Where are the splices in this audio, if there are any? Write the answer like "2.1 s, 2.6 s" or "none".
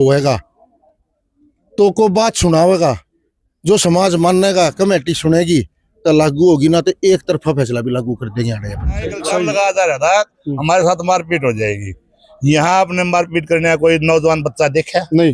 9.5 s